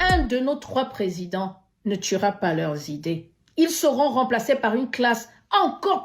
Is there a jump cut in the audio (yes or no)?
no